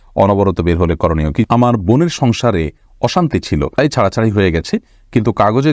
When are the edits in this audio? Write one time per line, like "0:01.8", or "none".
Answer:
0:01.5
0:03.8